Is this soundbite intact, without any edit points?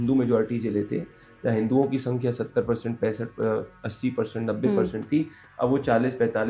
yes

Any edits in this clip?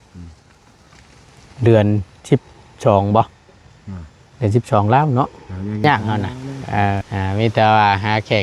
yes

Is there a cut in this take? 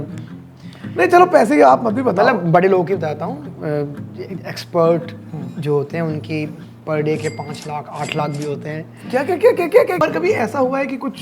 yes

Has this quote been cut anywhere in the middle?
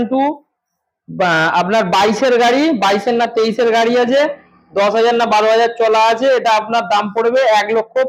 no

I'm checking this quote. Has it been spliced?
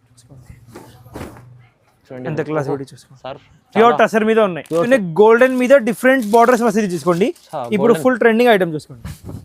yes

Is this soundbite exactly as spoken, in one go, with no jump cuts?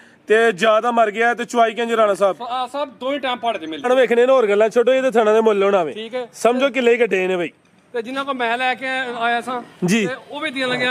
no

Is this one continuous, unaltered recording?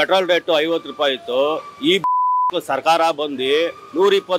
yes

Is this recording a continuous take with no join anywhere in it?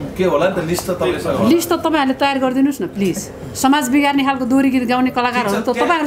yes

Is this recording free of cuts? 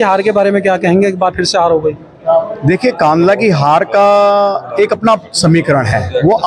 yes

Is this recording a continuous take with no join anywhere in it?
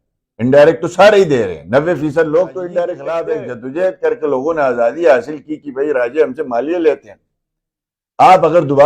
no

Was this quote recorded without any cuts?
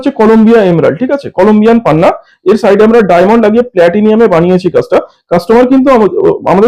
yes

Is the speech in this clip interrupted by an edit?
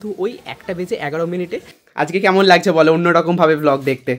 yes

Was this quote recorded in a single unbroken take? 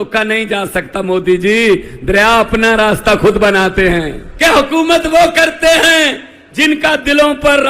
no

